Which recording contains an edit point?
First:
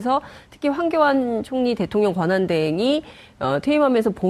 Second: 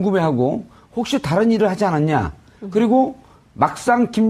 first; 1 cut; at 1.3 s

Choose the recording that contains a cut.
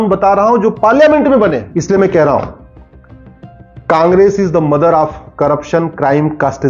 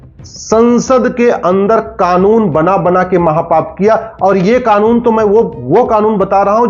first; 1 cut; at 1.7 s

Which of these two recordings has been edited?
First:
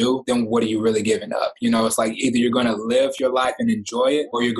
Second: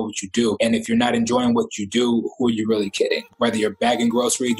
second; 1 cut; at 3.3 s

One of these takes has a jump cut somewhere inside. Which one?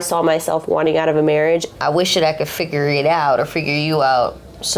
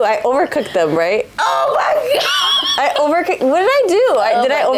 first; 1 cut; at 1.7 s

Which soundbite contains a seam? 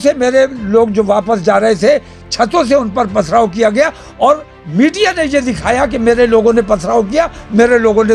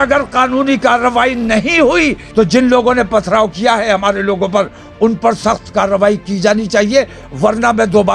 second; 1 cut; at 2.2 s

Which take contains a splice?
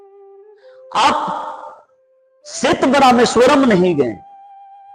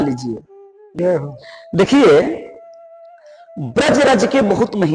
second; 1 cut; at 1.0 s

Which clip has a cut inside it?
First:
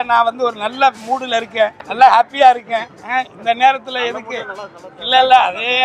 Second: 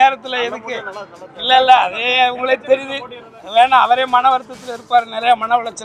first; 1 cut; at 1.8 s

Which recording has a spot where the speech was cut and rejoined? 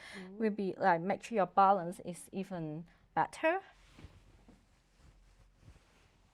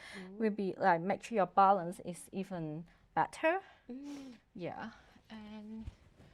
first; 1 cut; at 3.8 s

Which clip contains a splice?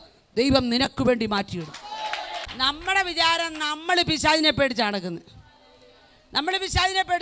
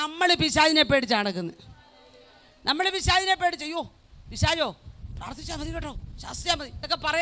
first; 1 cut; at 2.5 s

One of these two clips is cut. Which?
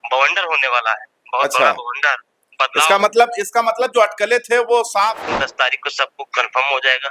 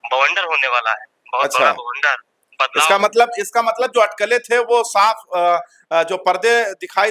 first; 1 cut; at 5.2 s

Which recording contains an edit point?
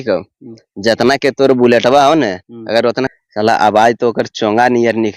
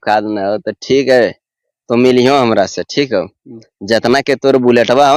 first; 1 cut; at 3.1 s

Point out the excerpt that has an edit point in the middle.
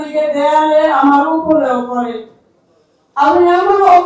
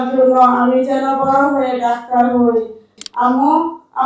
second; 1 cut; at 2.9 s

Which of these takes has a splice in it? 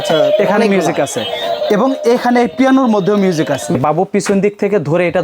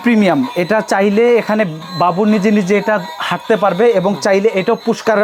first; 1 cut; at 3.7 s

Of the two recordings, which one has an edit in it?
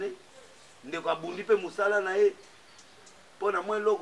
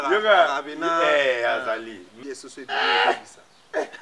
second; 1 cut; at 2.0 s

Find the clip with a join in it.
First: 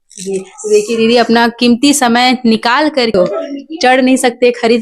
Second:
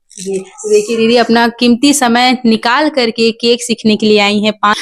first; 1 cut; at 3.1 s

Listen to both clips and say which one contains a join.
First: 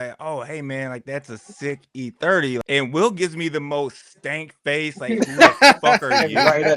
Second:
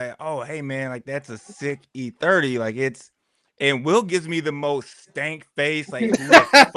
first; 1 cut; at 2.6 s

